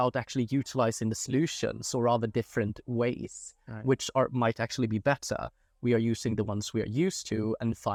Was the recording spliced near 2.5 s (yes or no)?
no